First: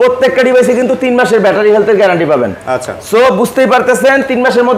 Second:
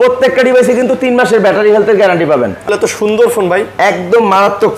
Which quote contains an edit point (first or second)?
second